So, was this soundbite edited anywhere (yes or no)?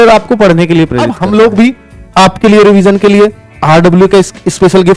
yes